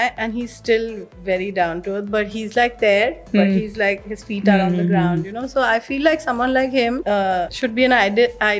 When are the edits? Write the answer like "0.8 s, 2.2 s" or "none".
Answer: 7.4 s